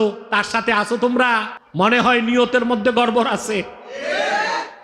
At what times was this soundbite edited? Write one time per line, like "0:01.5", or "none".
0:01.6

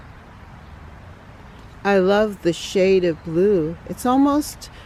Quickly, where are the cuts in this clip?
none

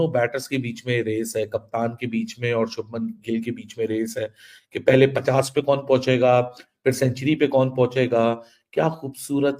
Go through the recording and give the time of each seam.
none

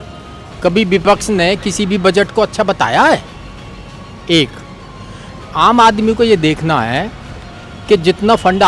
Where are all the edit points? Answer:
none

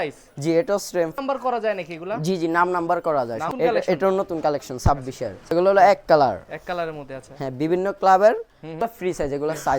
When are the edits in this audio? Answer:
0:01.1
0:03.5
0:05.4
0:08.8

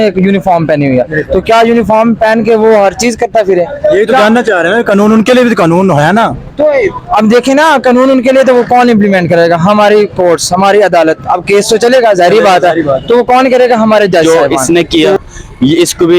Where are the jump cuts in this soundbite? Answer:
0:14.2

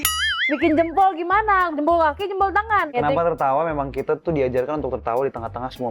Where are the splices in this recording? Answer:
0:02.9

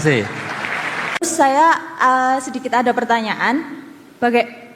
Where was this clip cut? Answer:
0:01.1

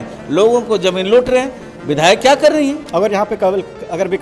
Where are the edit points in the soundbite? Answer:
0:02.8

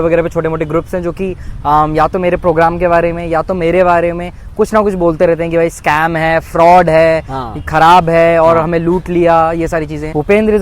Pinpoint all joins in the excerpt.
none

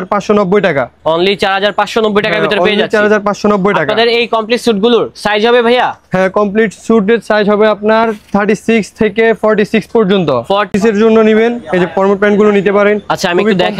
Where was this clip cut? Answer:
0:10.7

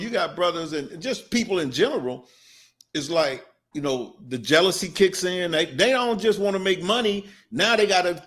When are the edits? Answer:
0:03.5

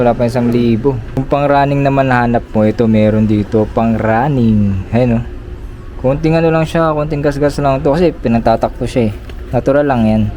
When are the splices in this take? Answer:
0:01.1

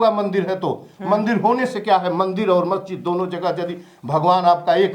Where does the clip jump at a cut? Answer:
none

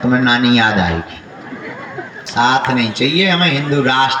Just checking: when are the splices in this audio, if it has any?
0:02.2

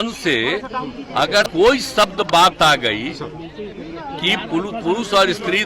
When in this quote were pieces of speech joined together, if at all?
0:01.5

